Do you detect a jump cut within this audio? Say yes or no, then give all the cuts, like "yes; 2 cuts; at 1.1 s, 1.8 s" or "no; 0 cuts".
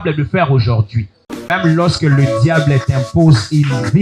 yes; 1 cut; at 1.4 s